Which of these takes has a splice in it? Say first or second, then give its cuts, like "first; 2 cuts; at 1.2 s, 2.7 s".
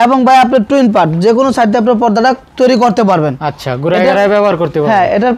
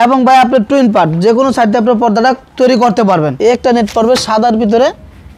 second; 1 cut; at 3.3 s